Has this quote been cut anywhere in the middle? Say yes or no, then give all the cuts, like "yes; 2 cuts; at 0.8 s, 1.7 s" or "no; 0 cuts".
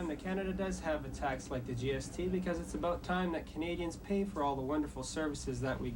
no; 0 cuts